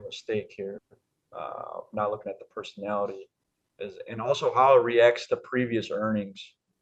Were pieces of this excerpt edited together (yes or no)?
no